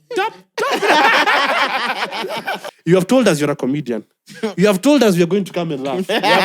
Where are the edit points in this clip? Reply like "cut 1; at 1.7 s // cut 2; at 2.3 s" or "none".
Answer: cut 1; at 2.7 s

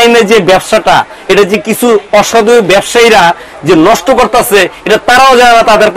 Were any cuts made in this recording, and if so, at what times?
none

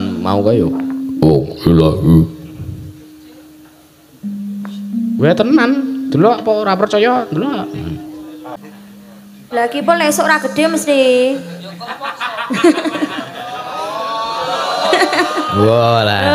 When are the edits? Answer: cut 1; at 8.6 s

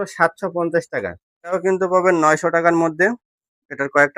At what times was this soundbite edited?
cut 1; at 1.5 s

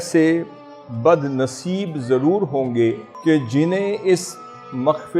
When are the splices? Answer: cut 1; at 3.1 s

